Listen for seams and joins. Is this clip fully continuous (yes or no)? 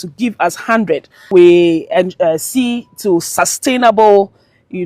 no